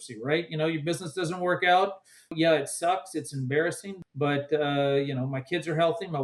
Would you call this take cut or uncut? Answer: cut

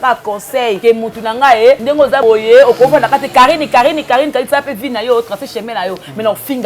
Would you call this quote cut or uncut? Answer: cut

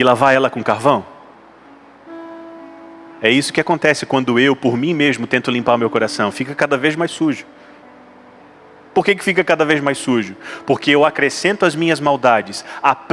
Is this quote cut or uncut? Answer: uncut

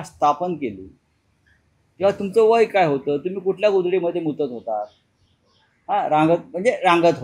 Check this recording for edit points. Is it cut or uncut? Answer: uncut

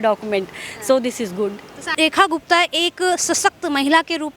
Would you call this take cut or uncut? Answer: cut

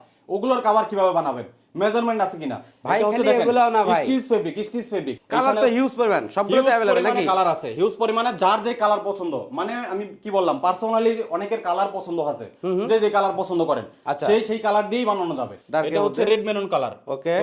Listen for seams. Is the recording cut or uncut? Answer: cut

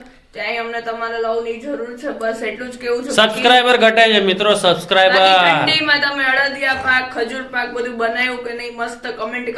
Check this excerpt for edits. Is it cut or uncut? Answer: uncut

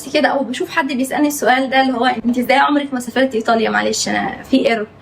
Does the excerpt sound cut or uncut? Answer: cut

